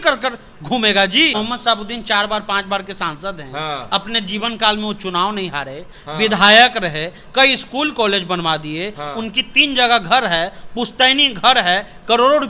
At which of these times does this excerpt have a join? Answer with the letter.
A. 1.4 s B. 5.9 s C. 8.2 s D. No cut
A